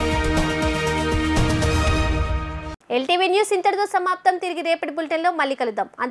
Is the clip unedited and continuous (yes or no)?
yes